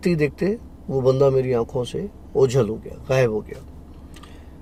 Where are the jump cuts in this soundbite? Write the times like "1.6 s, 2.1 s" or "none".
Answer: none